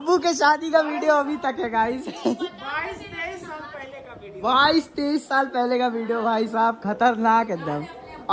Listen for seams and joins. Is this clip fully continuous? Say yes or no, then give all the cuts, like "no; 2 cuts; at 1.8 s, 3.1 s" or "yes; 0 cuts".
yes; 0 cuts